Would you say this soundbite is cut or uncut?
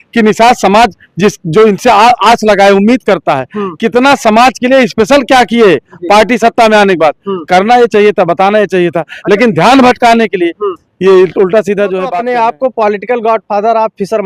cut